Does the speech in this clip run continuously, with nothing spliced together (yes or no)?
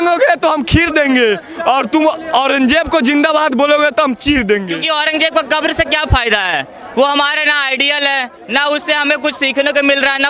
no